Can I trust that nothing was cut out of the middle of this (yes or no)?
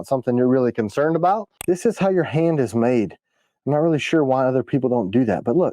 no